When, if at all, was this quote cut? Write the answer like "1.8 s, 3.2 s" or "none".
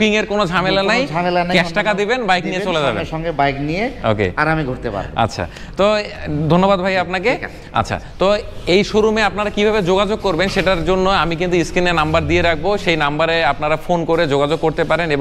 none